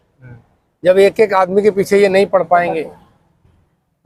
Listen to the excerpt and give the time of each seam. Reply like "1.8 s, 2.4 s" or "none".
none